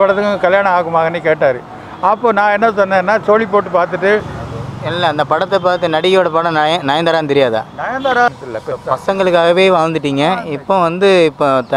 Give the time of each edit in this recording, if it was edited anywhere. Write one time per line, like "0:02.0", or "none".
0:04.3
0:08.3